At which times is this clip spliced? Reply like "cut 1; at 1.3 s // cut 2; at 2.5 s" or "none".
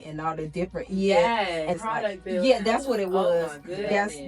cut 1; at 1.8 s